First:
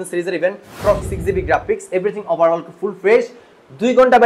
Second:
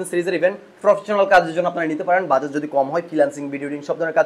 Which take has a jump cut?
first; 1 cut; at 1.1 s

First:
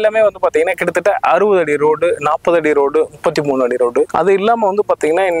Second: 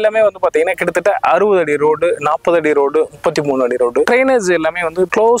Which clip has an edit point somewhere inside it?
second; 1 cut; at 4.1 s

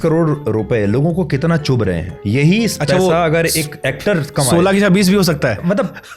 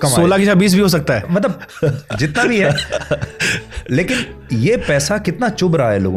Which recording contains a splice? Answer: first; 1 cut; at 2.1 s

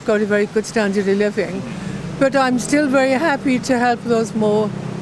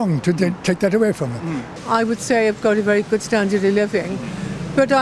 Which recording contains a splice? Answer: second; 1 cut; at 1.6 s

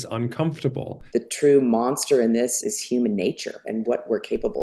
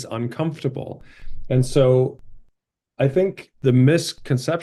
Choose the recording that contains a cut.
first; 3 cuts; at 0.9 s, 2.6 s, 3.7 s

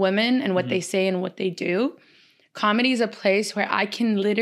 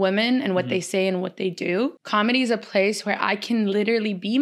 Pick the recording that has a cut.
second; 1 cut; at 2.0 s

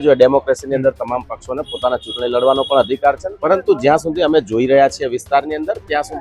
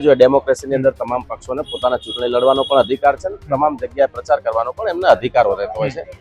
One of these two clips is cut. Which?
first; 1 cut; at 3.3 s

